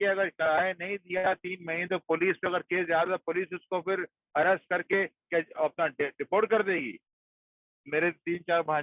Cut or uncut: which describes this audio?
cut